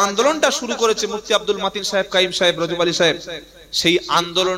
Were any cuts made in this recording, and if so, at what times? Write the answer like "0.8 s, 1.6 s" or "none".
none